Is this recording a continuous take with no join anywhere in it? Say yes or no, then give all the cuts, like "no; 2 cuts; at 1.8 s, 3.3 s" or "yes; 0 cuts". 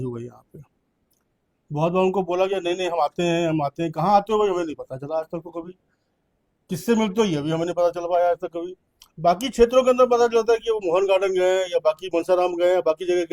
yes; 0 cuts